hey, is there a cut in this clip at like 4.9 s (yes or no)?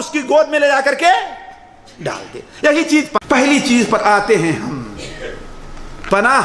no